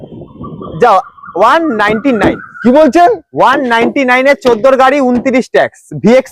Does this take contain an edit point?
no; 0 cuts

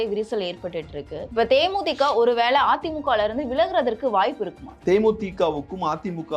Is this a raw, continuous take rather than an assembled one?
no; 2 cuts; at 1.2 s, 4.7 s

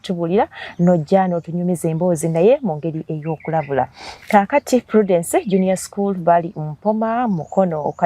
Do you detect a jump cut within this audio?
yes; 1 cut; at 4.1 s

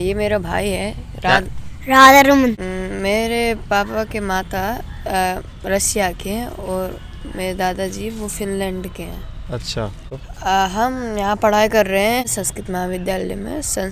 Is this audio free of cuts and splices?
no; 3 cuts; at 2.6 s, 10.0 s, 12.2 s

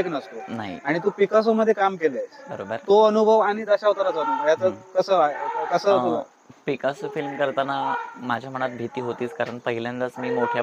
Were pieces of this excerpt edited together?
no; 0 cuts

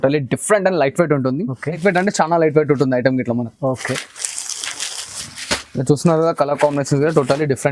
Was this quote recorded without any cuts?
no; 1 cut; at 1.8 s

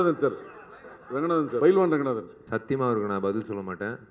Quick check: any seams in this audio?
yes; 2 cuts; at 1.6 s, 2.3 s

